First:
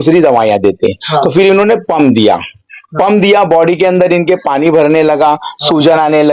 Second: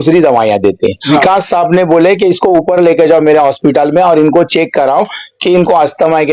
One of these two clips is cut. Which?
second; 1 cut; at 1.1 s

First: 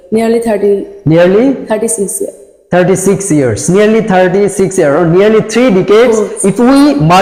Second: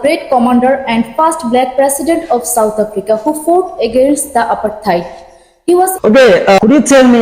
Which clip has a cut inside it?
second; 1 cut; at 5.9 s

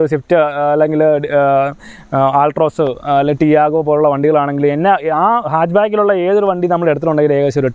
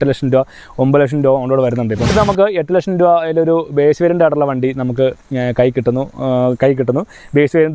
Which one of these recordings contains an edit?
second; 1 cut; at 2.1 s

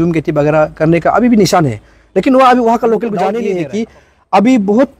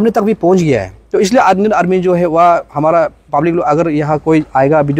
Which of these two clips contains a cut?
first; 1 cut; at 3.4 s

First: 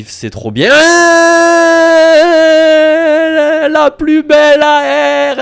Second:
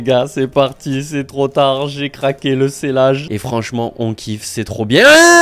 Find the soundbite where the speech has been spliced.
second; 1 cut; at 3.3 s

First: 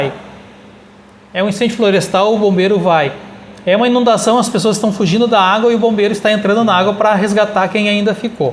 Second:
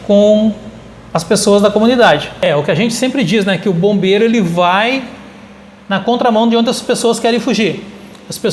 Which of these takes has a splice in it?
second; 1 cut; at 2.5 s

